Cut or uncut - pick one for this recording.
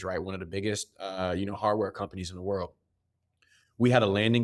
uncut